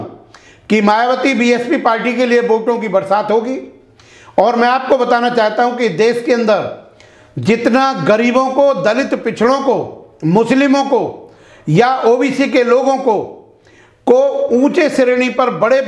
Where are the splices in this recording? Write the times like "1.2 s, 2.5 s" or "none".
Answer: none